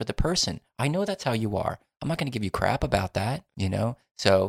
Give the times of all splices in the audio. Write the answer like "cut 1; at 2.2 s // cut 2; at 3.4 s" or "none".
cut 1; at 3.5 s